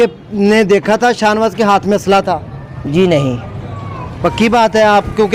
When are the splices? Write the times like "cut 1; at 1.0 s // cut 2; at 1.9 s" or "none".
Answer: none